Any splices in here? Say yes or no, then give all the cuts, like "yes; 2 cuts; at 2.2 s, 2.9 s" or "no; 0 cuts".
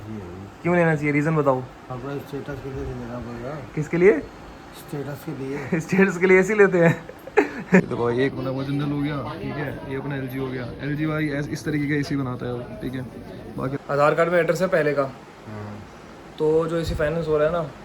yes; 3 cuts; at 1.8 s, 7.8 s, 13.8 s